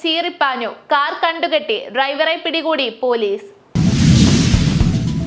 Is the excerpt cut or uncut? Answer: cut